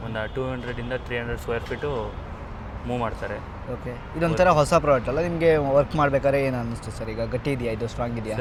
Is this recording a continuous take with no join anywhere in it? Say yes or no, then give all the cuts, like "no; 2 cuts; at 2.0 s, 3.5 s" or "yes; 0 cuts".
yes; 0 cuts